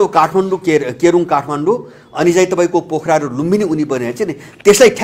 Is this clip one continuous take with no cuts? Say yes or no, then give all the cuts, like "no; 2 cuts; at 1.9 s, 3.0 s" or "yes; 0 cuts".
yes; 0 cuts